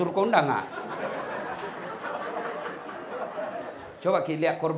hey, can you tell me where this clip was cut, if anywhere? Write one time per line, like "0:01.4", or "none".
0:03.9

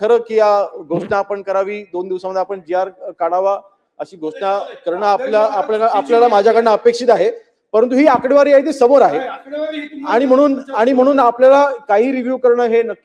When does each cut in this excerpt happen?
none

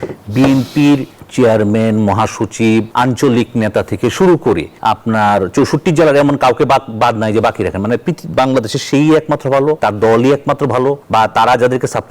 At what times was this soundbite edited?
0:01.2
0:02.9
0:04.7
0:09.8
0:11.0

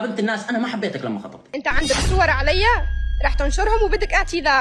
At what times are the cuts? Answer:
0:01.5

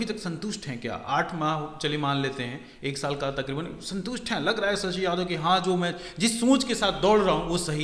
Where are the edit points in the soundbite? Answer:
none

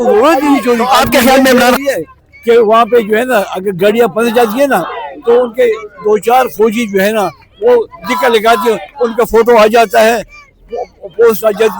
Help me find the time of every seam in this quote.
0:01.8

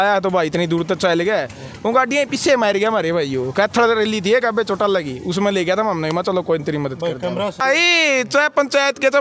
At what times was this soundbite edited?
0:07.6

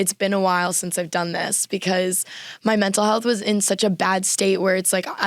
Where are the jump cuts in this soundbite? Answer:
none

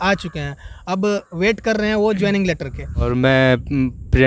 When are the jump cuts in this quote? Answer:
0:03.1

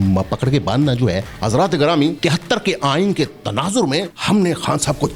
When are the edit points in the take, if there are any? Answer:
0:01.3
0:02.2
0:04.1

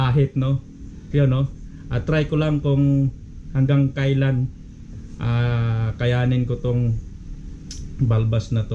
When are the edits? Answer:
none

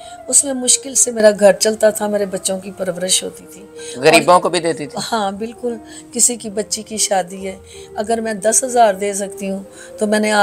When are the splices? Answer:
none

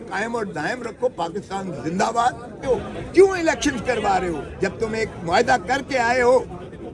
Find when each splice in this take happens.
0:02.5

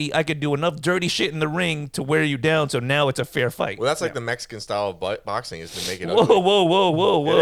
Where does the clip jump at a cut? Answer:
none

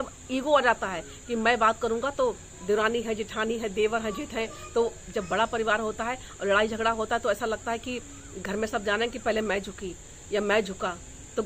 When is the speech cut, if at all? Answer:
none

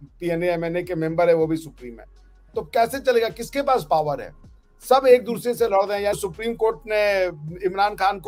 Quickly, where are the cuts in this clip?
none

